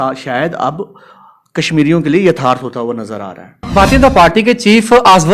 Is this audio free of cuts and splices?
no; 1 cut; at 3.7 s

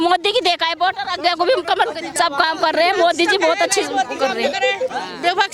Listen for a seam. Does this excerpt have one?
yes; 1 cut; at 2.1 s

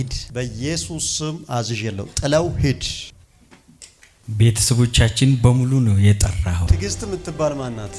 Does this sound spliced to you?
yes; 1 cut; at 4.2 s

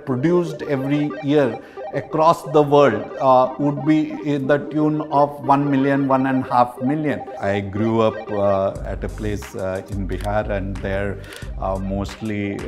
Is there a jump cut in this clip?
yes; 2 cuts; at 7.3 s, 8.8 s

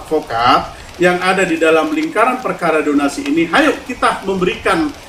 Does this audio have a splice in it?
no; 0 cuts

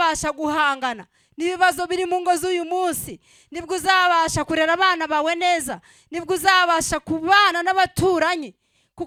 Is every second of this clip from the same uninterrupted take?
yes; 0 cuts

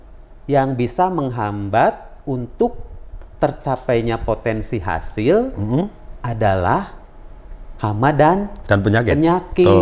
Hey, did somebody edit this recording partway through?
no; 0 cuts

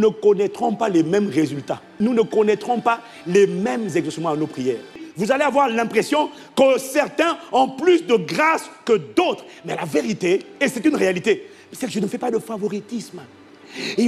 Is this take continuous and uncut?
no; 2 cuts; at 1.9 s, 5.1 s

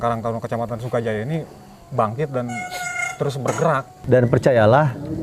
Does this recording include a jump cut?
yes; 1 cut; at 3.9 s

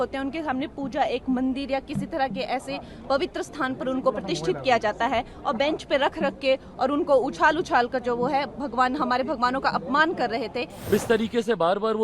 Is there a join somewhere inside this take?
yes; 1 cut; at 10.9 s

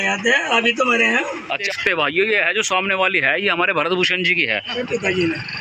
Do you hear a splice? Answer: no; 0 cuts

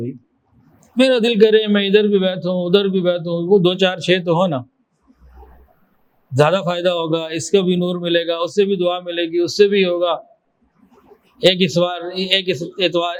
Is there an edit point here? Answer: no; 0 cuts

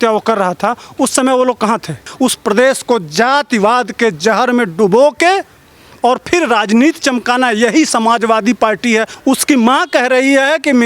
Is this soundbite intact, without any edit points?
no; 2 cuts; at 2.0 s, 9.1 s

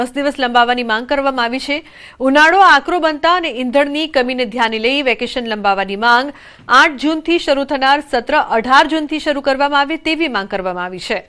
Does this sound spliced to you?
yes; 1 cut; at 3.5 s

